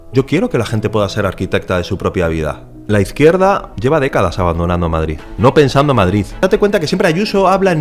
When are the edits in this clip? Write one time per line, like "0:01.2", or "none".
0:02.7
0:03.7
0:05.2
0:06.4